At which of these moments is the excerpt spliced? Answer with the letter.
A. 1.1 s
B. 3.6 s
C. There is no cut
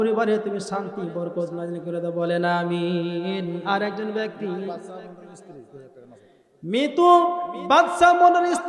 B